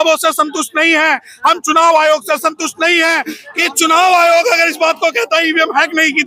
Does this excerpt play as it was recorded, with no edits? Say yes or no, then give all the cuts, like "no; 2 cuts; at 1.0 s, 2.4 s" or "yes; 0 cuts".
no; 1 cut; at 3.4 s